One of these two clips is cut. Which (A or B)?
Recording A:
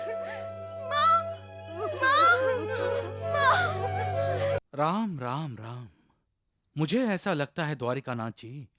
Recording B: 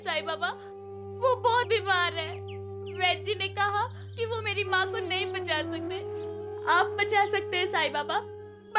A